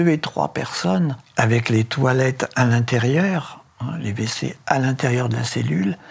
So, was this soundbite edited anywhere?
yes; 1 cut; at 1.2 s

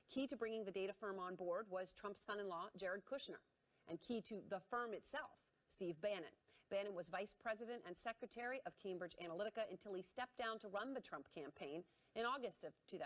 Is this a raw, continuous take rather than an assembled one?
yes; 0 cuts

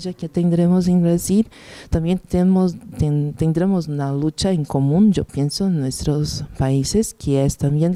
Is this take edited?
no; 0 cuts

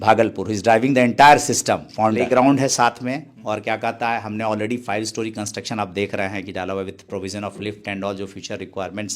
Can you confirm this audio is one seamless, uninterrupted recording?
no; 1 cut; at 2.2 s

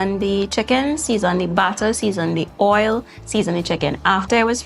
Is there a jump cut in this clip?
no; 0 cuts

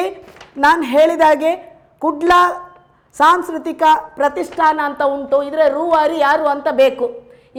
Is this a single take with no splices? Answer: yes; 0 cuts

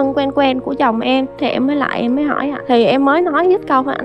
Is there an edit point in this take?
yes; 2 cuts; at 1.4 s, 2.5 s

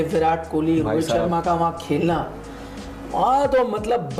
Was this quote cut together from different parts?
no; 0 cuts

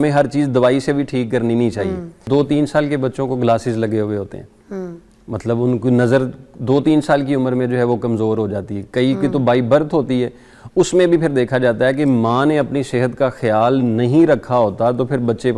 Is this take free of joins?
no; 1 cut; at 2.2 s

